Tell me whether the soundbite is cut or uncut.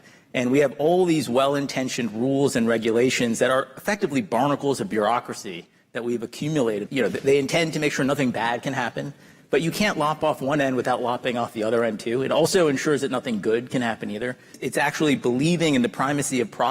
cut